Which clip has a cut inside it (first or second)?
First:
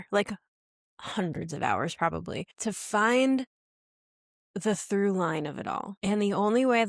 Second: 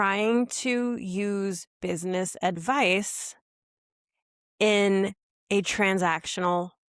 first